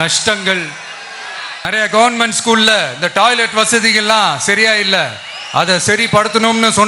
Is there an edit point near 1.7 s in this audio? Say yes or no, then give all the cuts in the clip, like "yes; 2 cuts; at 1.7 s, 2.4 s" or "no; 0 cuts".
yes; 1 cut; at 1.7 s